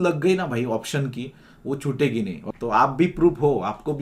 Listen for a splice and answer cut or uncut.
cut